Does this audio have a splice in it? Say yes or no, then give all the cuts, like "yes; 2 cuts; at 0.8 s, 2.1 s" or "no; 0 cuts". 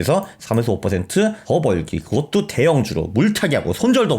yes; 1 cut; at 1.4 s